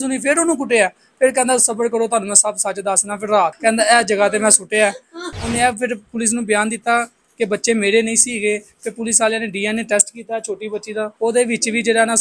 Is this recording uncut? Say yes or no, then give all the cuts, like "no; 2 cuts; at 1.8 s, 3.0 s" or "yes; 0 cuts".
no; 3 cuts; at 3.6 s, 5.3 s, 11.1 s